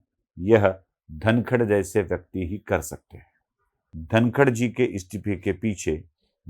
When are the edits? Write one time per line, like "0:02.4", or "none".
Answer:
0:03.9